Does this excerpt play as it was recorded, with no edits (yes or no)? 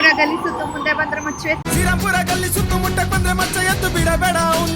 no